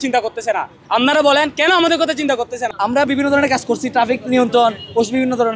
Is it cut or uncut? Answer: cut